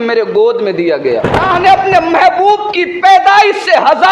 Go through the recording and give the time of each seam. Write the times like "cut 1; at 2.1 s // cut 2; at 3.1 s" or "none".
cut 1; at 1.5 s